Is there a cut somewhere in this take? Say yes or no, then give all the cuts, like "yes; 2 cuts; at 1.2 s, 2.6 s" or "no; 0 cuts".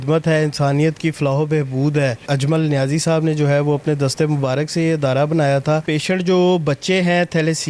yes; 2 cuts; at 2.2 s, 5.8 s